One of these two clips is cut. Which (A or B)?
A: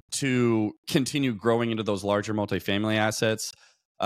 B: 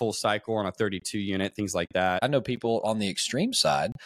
B